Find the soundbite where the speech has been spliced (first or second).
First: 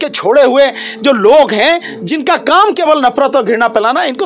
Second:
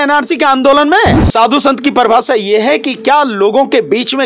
second